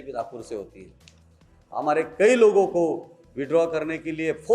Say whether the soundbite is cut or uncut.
cut